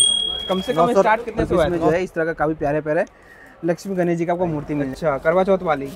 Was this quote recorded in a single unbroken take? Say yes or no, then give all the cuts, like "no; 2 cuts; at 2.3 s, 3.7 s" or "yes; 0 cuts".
no; 2 cuts; at 1.8 s, 4.9 s